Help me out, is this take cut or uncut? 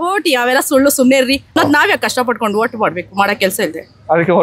cut